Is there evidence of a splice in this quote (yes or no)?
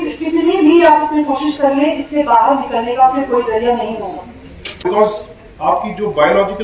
yes